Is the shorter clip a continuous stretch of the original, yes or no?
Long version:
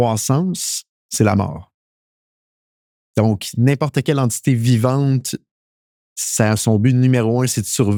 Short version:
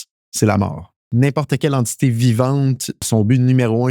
no